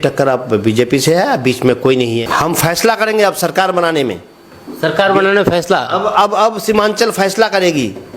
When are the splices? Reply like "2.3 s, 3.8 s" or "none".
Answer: 2.2 s